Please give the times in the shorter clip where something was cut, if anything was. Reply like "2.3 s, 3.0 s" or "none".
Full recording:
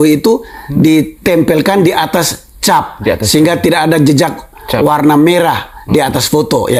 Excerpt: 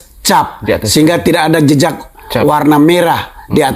none

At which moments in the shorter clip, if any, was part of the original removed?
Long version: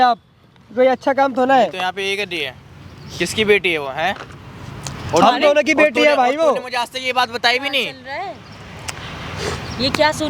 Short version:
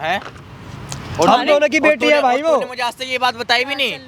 none

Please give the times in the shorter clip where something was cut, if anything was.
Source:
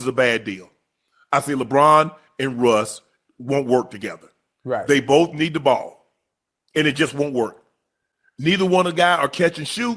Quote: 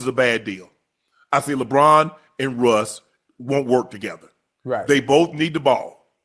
none

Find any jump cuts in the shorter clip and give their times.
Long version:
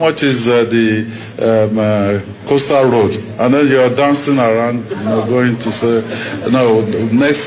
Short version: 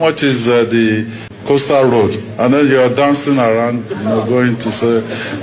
1.3 s

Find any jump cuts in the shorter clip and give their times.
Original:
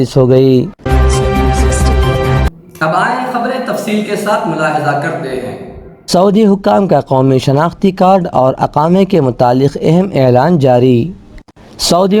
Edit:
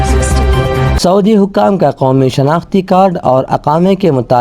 0.9 s

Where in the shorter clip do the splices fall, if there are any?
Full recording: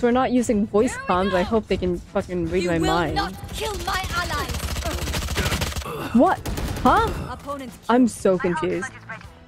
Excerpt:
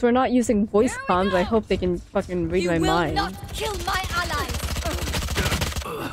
none

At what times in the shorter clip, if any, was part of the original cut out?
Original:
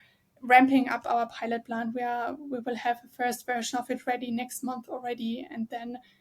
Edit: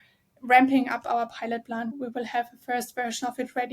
1.9 s

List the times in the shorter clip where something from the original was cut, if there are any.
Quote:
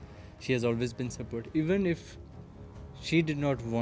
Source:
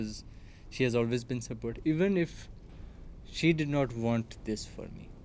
none

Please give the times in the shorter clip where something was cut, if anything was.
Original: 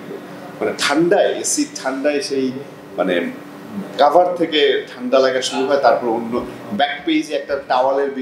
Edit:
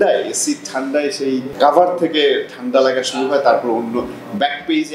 1.5 s

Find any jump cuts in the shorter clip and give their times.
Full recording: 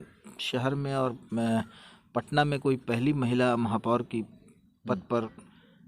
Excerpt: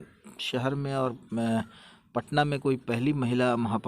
none

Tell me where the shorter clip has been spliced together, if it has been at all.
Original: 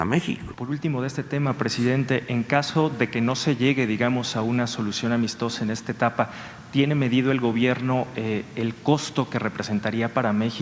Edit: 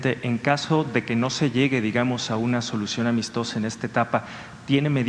none

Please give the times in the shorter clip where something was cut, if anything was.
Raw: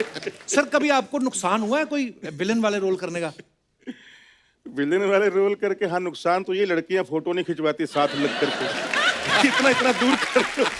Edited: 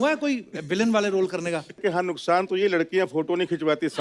1.8 s

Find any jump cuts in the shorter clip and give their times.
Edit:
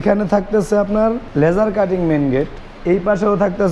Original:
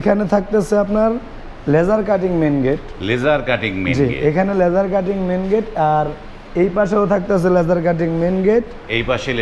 1.2 s, 2.6 s

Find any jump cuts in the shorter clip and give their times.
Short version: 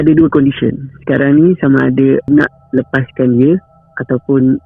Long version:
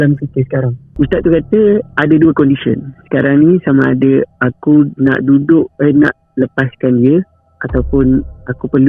2.3 s

